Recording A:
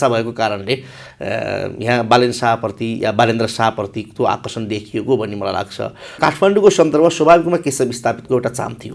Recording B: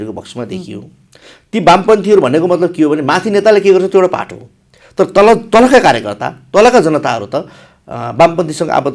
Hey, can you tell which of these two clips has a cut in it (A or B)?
A